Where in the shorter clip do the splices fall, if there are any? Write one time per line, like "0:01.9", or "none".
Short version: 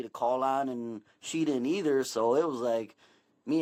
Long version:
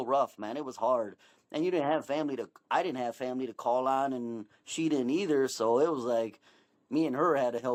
none